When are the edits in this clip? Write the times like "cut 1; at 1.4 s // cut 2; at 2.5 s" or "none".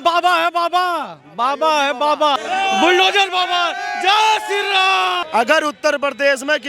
cut 1; at 2.4 s // cut 2; at 5.2 s